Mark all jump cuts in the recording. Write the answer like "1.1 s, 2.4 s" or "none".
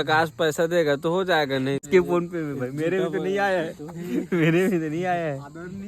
1.9 s